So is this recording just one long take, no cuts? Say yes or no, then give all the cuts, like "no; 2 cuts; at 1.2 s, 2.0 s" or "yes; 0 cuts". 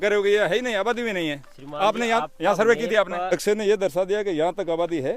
no; 1 cut; at 3.3 s